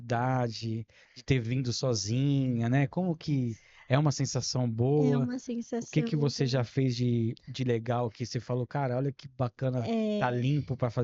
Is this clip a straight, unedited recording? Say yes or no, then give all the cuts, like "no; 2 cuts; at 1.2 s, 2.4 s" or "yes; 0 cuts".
yes; 0 cuts